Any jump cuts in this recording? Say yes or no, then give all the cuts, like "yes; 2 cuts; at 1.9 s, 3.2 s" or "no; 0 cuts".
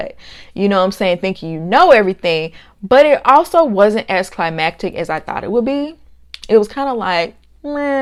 no; 0 cuts